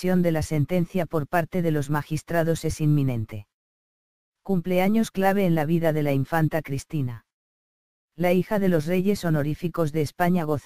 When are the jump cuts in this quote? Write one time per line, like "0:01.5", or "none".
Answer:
0:01.5